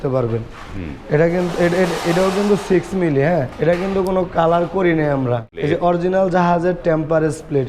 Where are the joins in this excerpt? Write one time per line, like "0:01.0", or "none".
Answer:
0:03.5
0:05.5